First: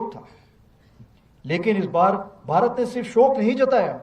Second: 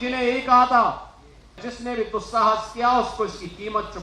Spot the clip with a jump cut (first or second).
second